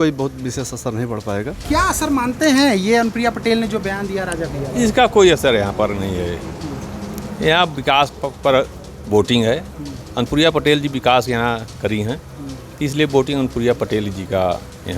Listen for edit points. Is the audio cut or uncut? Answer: cut